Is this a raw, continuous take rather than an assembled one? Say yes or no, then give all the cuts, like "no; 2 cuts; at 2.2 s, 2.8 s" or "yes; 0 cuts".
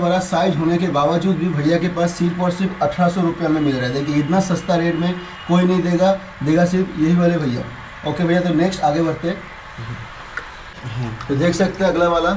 yes; 0 cuts